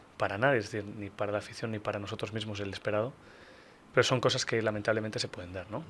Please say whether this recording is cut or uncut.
uncut